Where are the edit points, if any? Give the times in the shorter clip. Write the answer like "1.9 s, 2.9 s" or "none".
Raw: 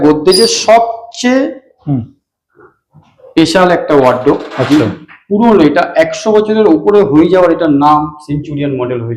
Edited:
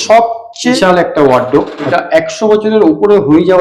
0.8 s, 1.9 s